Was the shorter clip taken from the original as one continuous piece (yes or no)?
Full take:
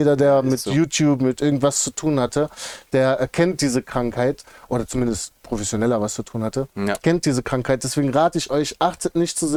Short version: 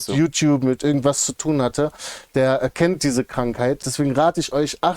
no